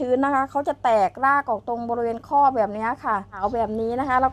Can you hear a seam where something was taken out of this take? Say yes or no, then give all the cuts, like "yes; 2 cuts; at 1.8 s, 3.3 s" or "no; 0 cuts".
yes; 1 cut; at 3.3 s